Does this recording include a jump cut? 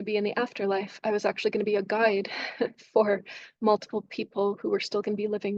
no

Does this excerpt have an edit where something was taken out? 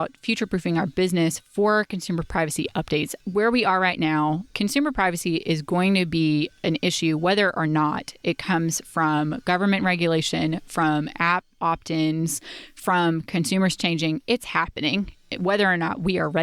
yes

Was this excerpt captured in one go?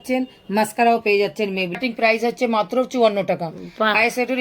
no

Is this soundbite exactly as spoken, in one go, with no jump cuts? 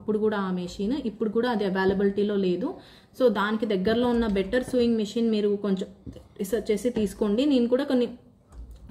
yes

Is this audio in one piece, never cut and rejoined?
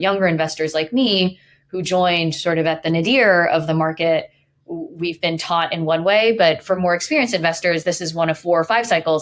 yes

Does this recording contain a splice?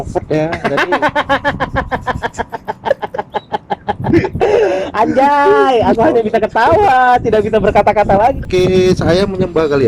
yes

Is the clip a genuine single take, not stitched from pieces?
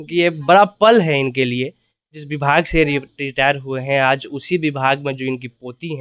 no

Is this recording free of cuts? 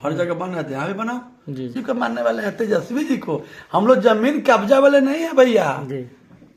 no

